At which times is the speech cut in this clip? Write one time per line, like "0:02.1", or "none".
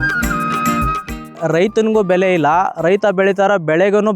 0:01.4